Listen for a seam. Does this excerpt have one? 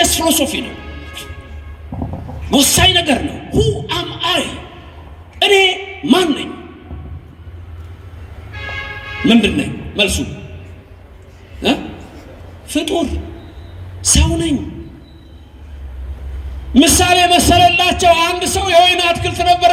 no; 0 cuts

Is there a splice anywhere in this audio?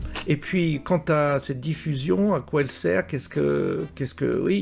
no; 0 cuts

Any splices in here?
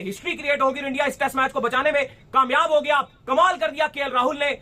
no; 0 cuts

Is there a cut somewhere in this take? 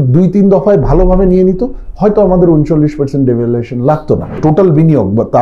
yes; 1 cut; at 4.4 s

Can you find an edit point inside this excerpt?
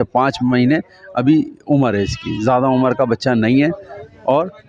no; 0 cuts

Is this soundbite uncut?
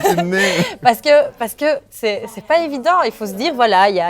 yes; 0 cuts

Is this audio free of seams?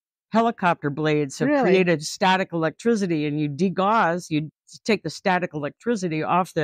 yes; 0 cuts

